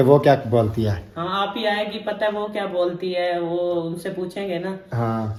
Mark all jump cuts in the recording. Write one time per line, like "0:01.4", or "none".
none